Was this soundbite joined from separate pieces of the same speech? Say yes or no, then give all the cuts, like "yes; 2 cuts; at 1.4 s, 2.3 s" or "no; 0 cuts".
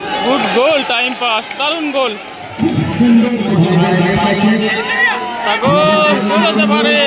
yes; 1 cut; at 3.4 s